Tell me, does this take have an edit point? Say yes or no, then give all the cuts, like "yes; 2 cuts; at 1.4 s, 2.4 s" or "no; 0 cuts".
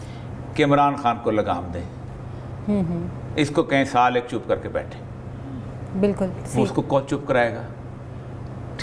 no; 0 cuts